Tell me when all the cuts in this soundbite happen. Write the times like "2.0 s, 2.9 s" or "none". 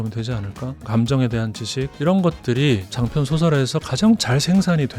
0.9 s, 3.0 s